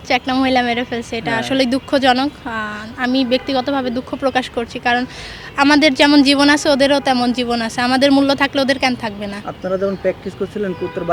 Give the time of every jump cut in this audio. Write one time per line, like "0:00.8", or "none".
none

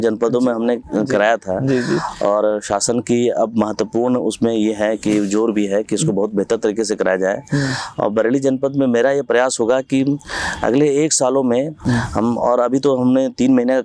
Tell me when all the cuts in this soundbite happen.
none

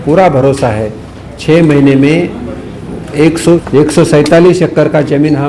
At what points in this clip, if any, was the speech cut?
0:03.6

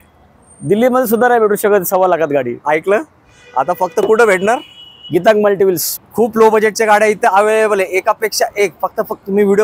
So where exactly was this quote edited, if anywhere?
0:05.9

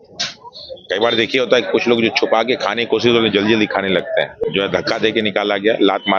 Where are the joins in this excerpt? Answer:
0:04.4

